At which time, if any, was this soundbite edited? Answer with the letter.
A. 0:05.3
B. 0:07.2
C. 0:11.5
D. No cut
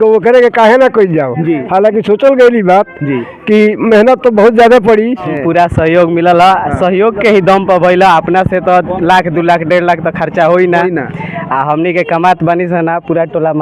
A